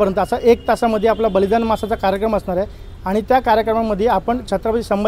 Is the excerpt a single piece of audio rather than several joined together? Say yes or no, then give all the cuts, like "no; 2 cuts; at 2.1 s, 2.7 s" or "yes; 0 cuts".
yes; 0 cuts